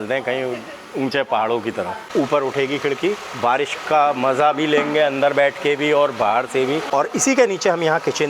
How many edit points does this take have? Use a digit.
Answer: 2